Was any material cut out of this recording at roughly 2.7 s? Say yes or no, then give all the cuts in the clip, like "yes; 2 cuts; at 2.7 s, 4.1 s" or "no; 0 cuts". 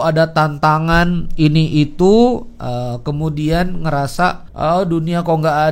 no; 1 cut; at 4.5 s